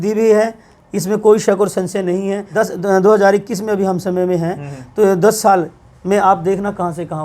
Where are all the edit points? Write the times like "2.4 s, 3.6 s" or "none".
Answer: 2.4 s